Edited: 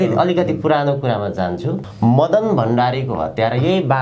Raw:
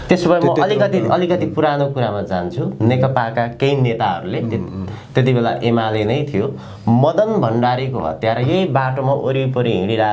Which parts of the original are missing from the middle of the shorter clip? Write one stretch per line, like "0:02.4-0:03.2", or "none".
0:02.7-0:06.6